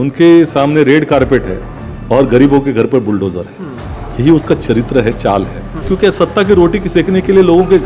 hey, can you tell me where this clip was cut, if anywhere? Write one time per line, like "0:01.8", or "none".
0:05.8